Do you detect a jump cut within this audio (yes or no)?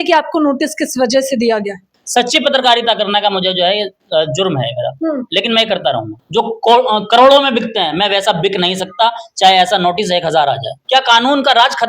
yes